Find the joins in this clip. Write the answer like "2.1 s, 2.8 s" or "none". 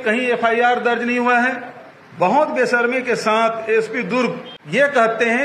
4.5 s